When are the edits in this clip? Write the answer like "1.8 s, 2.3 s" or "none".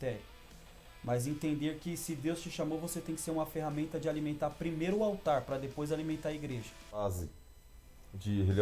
7.0 s